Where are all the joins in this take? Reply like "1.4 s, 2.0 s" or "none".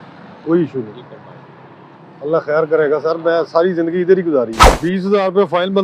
4.6 s